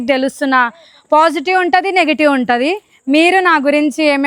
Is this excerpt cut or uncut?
uncut